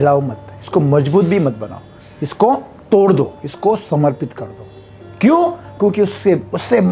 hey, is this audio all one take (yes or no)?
yes